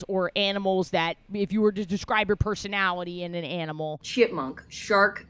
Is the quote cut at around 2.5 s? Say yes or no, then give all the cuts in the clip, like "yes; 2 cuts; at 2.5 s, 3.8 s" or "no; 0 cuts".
no; 2 cuts; at 1.2 s, 4.0 s